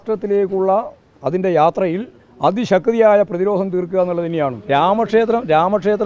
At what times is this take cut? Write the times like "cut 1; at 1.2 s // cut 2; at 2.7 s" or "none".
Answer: cut 1; at 4.6 s